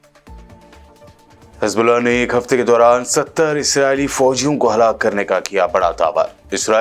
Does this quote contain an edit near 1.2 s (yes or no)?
yes